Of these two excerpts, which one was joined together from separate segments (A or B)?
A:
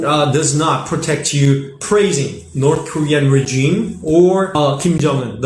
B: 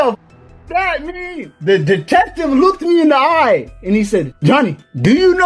B